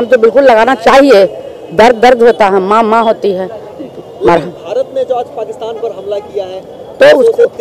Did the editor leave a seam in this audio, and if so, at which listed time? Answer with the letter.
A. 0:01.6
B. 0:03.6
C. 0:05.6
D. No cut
D